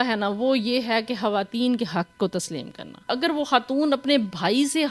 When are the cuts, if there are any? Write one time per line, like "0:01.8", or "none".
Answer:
0:03.0